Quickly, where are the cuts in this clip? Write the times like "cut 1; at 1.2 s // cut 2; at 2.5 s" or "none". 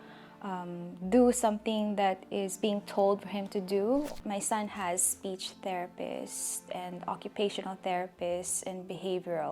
cut 1; at 4.1 s